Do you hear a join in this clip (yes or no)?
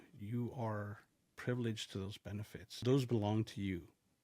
yes